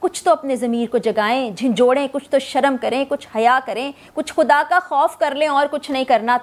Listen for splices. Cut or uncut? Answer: uncut